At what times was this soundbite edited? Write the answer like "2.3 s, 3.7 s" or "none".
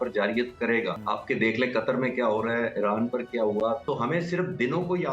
1.0 s, 3.8 s